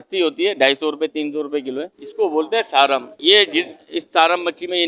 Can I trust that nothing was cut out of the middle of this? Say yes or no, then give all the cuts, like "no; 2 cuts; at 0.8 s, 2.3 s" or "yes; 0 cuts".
no; 1 cut; at 2.0 s